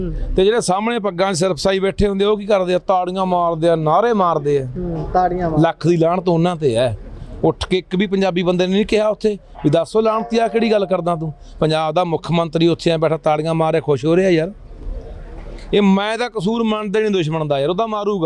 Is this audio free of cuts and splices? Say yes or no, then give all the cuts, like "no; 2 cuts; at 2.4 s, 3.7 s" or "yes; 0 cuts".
yes; 0 cuts